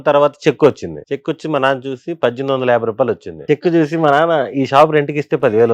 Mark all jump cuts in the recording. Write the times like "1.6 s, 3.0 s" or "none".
0.9 s, 3.5 s

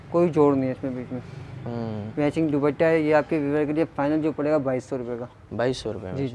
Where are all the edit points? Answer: none

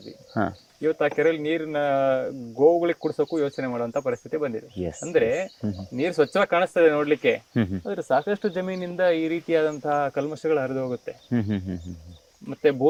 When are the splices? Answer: none

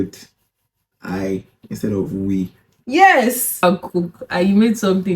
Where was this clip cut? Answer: 3.6 s

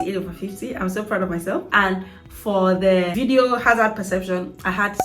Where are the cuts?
1.7 s, 3.1 s

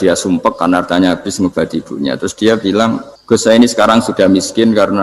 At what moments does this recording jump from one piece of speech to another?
3.1 s

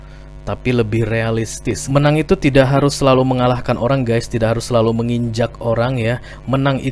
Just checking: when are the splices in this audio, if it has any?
1.8 s

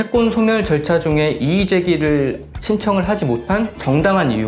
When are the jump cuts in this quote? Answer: none

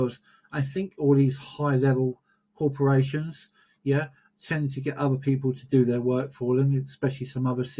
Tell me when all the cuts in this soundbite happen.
none

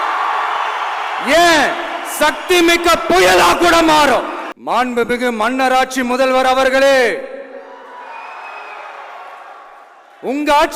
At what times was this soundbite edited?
4.5 s

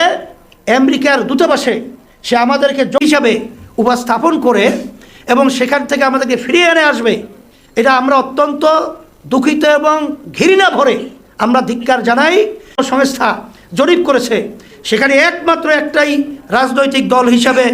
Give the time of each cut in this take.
3.0 s, 12.8 s

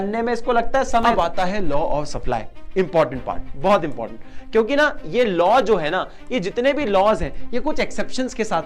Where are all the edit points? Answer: 1.0 s

